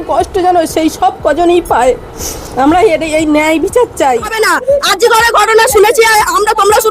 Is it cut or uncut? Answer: cut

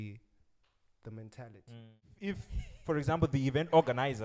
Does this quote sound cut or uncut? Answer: cut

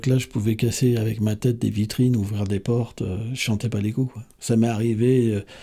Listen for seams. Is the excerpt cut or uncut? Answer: cut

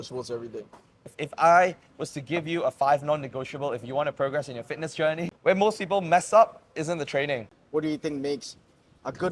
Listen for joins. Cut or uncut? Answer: cut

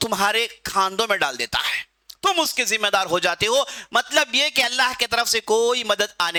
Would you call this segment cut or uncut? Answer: uncut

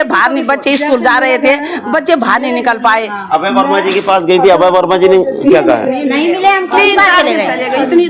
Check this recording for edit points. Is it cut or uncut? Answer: uncut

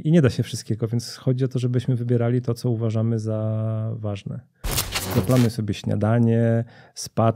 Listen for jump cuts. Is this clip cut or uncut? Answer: cut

